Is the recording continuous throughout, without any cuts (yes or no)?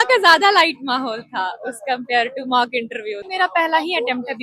no